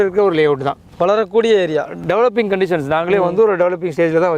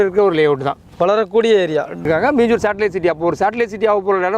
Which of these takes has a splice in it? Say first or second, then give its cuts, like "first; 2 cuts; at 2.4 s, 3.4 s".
second; 1 cut; at 2.0 s